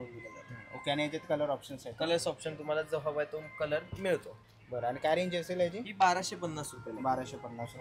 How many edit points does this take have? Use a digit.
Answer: 0